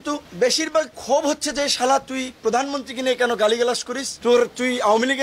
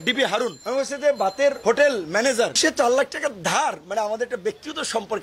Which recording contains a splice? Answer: second; 1 cut; at 2.5 s

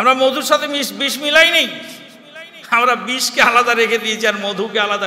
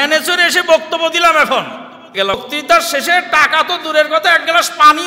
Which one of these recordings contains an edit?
second; 1 cut; at 2.4 s

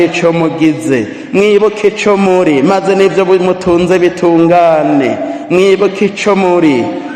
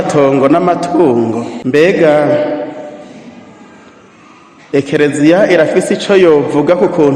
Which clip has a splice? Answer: second; 1 cut; at 1.5 s

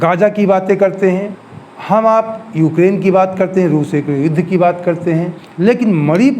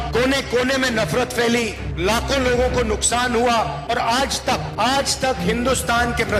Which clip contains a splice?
first; 2 cuts; at 1.4 s, 5.4 s

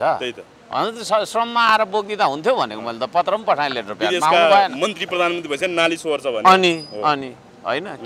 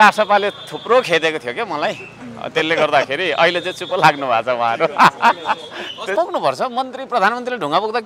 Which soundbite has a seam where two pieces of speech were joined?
second; 1 cut; at 6.1 s

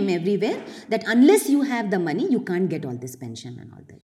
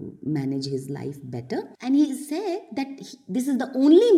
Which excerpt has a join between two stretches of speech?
second; 1 cut; at 1.7 s

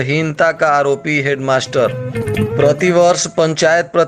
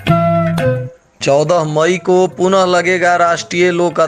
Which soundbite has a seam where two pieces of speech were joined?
second; 1 cut; at 0.9 s

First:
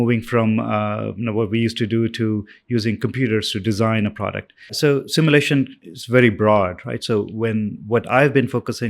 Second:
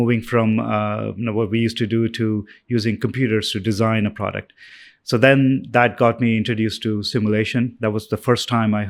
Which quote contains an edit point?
first; 1 cut; at 4.7 s

